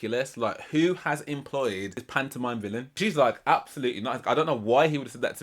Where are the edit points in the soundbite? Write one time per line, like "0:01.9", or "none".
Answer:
0:02.0
0:02.9

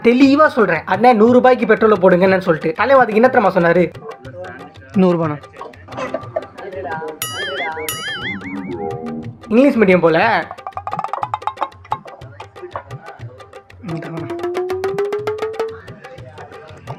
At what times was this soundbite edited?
none

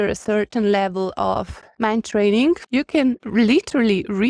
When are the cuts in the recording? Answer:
0:01.1
0:03.2

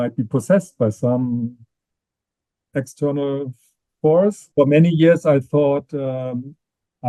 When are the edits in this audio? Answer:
0:04.4

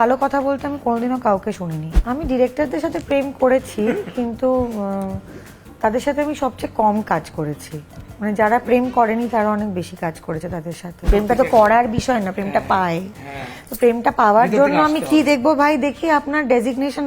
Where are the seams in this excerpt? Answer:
0:01.9
0:10.9

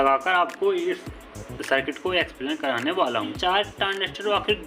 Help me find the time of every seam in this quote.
0:03.3

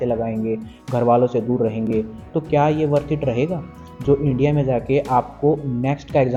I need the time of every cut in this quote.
none

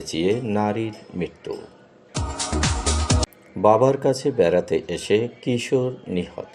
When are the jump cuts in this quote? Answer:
none

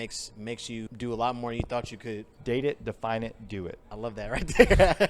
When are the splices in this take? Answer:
0:00.9
0:02.3
0:03.9

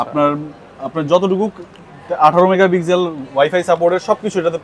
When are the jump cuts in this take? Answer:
none

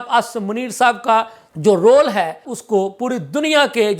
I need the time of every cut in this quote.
0:01.4
0:02.5

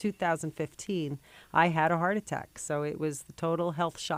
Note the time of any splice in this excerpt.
none

